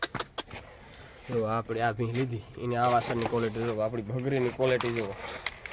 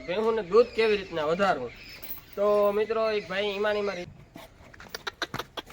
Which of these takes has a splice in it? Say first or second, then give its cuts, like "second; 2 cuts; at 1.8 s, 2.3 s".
second; 1 cut; at 4.1 s